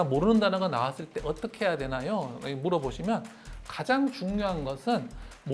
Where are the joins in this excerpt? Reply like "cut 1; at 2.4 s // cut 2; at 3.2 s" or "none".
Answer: none

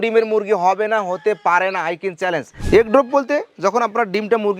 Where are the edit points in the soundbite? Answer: cut 1; at 2.6 s

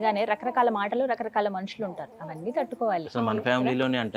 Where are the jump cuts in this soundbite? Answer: none

